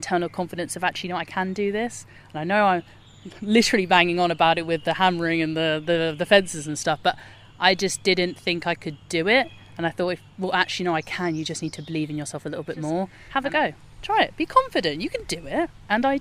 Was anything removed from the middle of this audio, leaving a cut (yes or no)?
yes